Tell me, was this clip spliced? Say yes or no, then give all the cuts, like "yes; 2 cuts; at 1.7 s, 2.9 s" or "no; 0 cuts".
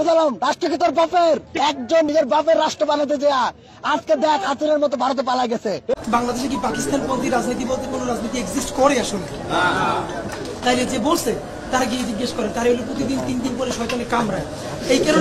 yes; 2 cuts; at 1.6 s, 5.9 s